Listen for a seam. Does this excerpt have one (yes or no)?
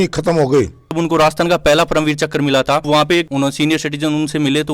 yes